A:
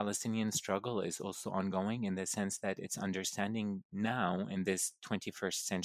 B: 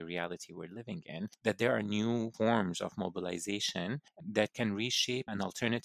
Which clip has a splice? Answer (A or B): B